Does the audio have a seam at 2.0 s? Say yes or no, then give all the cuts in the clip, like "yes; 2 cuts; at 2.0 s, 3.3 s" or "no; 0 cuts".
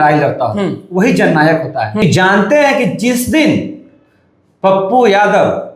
yes; 1 cut; at 2.0 s